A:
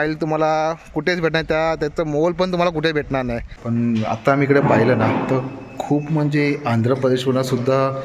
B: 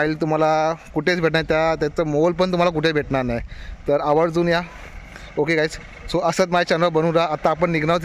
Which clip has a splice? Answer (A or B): A